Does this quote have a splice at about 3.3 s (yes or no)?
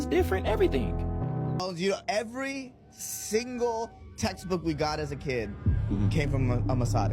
no